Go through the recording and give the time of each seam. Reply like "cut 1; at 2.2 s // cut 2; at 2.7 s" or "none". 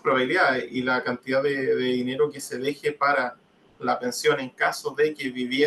none